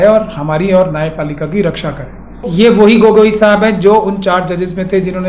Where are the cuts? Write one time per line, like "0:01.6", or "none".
0:02.5